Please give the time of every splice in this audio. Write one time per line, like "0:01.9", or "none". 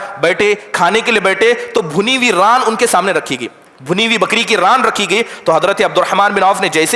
none